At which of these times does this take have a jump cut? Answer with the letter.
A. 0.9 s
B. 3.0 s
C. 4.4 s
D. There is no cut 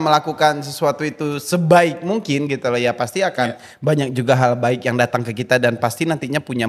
D